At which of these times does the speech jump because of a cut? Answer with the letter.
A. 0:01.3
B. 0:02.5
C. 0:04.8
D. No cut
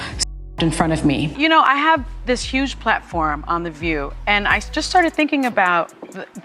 A